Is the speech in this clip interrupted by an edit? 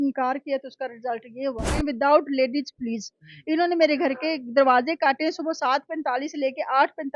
yes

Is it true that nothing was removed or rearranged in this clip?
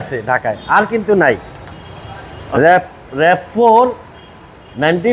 yes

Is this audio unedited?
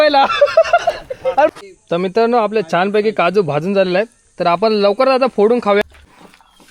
no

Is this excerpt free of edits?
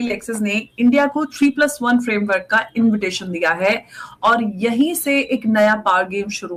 yes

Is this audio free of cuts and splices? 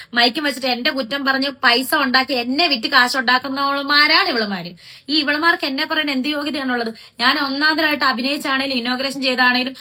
yes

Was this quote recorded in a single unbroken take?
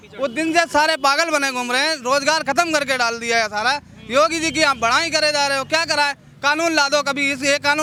yes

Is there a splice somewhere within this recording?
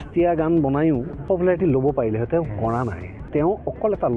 yes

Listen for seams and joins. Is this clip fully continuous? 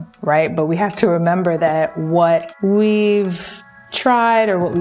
no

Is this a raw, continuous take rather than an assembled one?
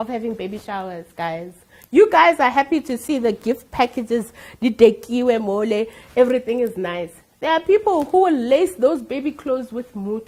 yes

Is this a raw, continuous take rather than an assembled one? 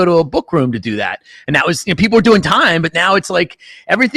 yes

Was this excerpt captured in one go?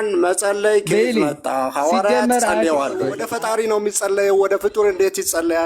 no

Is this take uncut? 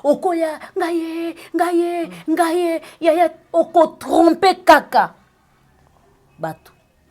yes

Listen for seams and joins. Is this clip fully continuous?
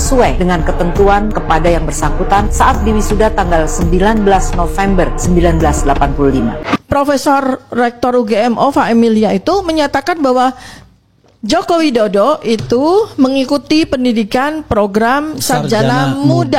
no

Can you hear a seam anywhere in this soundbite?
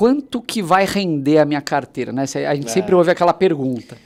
no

